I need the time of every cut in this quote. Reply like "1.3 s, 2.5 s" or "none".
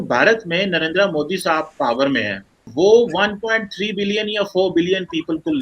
2.7 s